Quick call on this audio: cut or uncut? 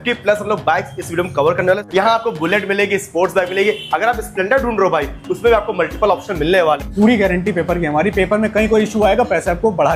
cut